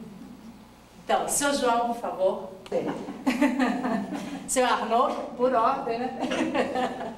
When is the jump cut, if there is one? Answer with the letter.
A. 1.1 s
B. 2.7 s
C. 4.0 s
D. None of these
B